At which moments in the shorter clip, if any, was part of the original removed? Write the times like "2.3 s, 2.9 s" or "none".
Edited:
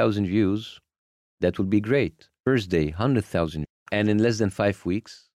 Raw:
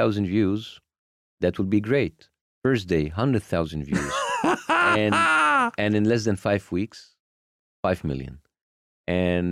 2.2 s, 3.8 s